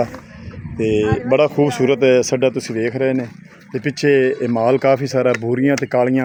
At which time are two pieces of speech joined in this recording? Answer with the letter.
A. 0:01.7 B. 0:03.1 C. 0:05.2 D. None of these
D